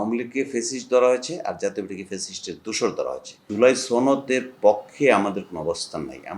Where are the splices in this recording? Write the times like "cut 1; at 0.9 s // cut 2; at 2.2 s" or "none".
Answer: cut 1; at 3.4 s